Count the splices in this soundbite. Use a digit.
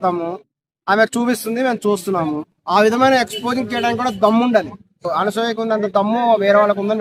2